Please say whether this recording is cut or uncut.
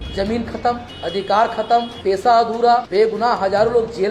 cut